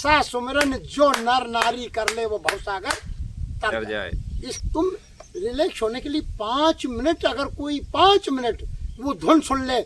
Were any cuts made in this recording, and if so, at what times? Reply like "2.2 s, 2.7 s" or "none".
4.6 s